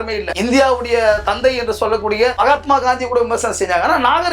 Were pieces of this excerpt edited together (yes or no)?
no